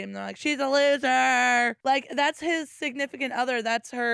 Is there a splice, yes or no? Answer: yes